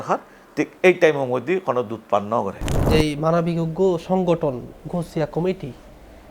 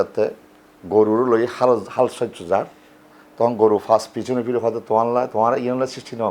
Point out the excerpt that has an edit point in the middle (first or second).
first